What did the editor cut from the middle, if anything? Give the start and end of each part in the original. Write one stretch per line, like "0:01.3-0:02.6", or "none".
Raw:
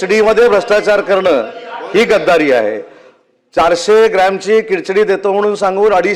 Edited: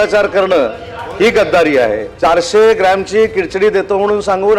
0:02.8-0:03.4